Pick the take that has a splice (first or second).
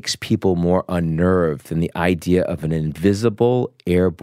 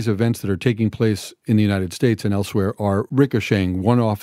second